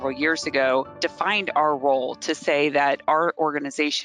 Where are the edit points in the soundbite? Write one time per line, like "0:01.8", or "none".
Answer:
0:01.0